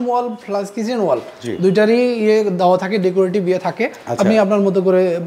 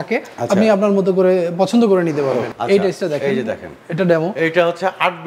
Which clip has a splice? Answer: second; 1 cut; at 2.5 s

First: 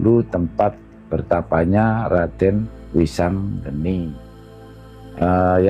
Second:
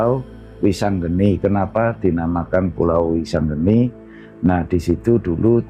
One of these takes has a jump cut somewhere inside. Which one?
first; 2 cuts; at 2.8 s, 4.5 s

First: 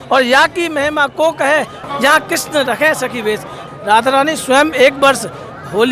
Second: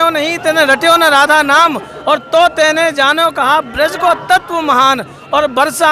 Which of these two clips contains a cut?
first; 2 cuts; at 1.8 s, 3.6 s

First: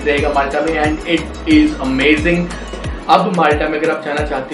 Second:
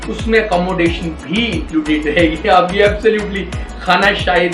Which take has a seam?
first; 1 cut; at 2.8 s

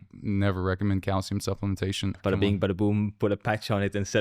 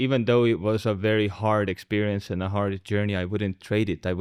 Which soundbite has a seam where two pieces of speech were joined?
first; 1 cut; at 2.2 s

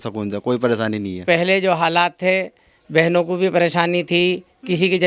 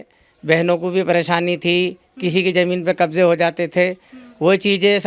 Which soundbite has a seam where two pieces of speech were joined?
first; 1 cut; at 1.2 s

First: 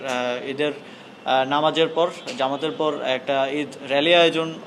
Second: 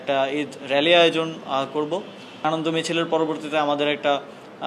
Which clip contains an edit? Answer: second; 1 cut; at 2.4 s

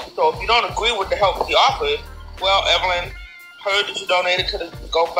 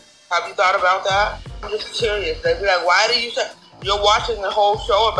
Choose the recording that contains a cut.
second; 1 cut; at 1.6 s

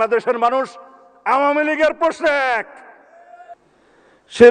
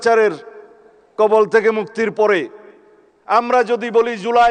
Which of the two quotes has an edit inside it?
first; 1 cut; at 3.5 s

